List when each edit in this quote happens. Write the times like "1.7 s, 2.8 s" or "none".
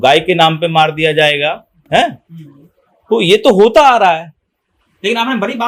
none